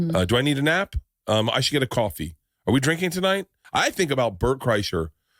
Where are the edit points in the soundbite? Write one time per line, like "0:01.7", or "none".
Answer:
0:03.6